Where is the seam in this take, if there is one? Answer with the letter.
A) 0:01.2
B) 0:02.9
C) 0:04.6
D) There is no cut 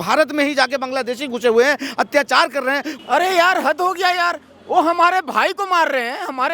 B